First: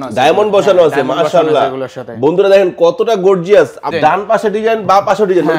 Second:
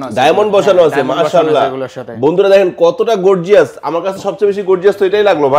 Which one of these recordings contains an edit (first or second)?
first